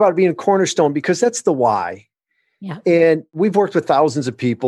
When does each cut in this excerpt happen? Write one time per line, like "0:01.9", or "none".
0:03.3